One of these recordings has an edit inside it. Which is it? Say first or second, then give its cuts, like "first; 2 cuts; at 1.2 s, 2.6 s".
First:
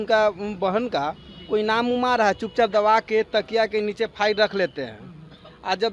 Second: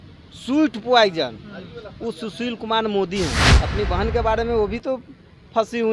second; 1 cut; at 3.4 s